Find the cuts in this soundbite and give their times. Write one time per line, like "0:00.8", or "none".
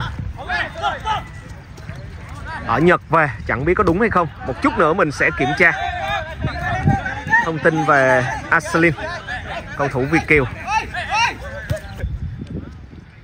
0:12.0

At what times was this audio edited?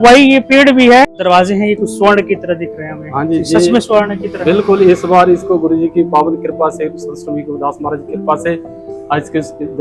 0:01.2

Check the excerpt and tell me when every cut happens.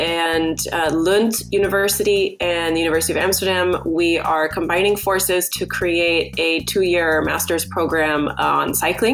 none

